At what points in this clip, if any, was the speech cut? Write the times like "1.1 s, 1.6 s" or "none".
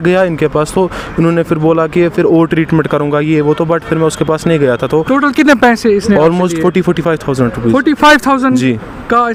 none